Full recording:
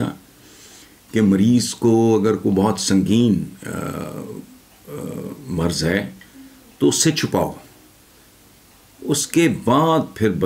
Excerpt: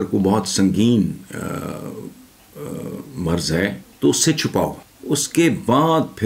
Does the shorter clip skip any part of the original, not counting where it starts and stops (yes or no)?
yes